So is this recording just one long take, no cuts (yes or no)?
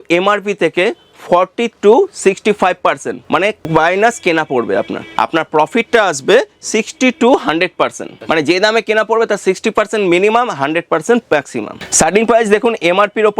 no